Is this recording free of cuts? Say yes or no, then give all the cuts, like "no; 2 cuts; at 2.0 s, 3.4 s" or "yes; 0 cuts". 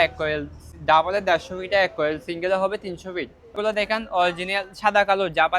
no; 1 cut; at 3.5 s